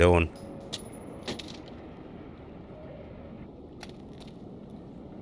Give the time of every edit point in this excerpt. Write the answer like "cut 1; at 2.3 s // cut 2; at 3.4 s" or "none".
cut 1; at 3.5 s